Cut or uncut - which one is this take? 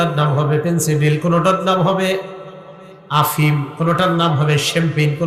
uncut